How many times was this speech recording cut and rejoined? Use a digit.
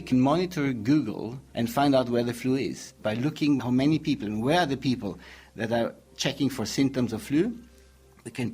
2